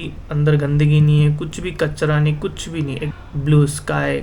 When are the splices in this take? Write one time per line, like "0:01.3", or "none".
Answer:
0:03.1